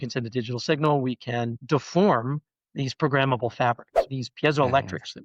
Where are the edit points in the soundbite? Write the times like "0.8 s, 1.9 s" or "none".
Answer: 4.2 s